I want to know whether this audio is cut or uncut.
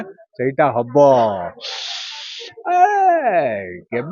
uncut